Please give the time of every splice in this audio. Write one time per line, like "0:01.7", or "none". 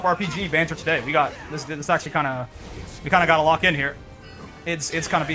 none